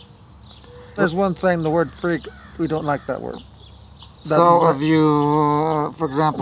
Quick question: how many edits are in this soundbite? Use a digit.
1